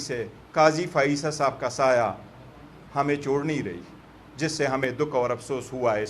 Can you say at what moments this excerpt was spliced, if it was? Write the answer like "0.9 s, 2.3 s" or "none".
none

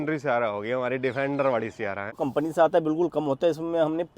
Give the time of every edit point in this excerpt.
2.1 s

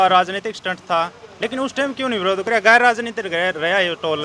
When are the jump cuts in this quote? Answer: none

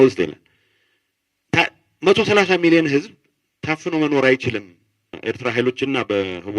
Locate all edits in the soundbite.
5.1 s

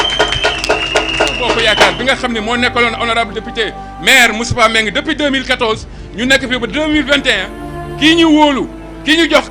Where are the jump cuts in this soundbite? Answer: 1.6 s

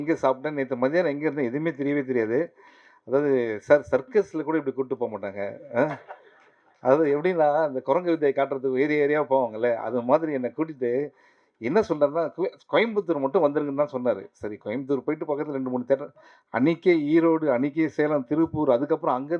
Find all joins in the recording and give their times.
none

